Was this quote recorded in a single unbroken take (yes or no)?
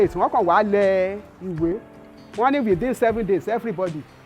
no